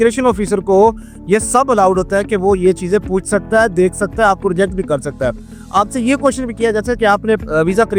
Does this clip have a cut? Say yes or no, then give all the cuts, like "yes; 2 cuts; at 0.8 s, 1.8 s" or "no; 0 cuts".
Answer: no; 0 cuts